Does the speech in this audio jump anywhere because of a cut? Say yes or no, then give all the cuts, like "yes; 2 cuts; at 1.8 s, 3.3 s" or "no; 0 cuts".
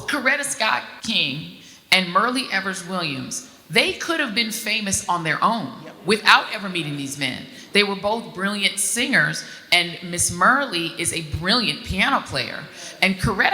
yes; 1 cut; at 0.9 s